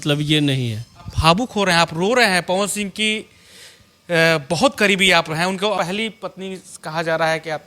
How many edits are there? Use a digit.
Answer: 1